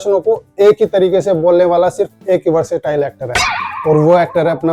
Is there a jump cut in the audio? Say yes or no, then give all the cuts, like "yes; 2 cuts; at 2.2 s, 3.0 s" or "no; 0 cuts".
no; 0 cuts